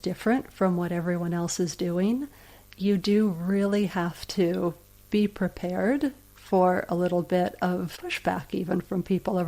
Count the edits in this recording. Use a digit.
1